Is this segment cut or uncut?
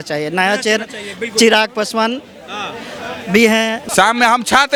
uncut